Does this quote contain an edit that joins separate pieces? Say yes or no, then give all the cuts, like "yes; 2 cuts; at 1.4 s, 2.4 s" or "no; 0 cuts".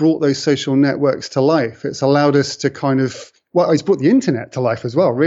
no; 0 cuts